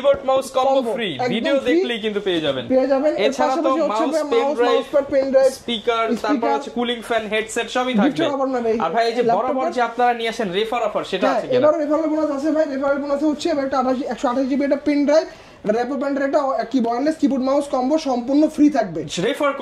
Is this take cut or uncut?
uncut